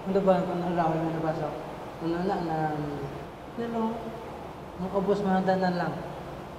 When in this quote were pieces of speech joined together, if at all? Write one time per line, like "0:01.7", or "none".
none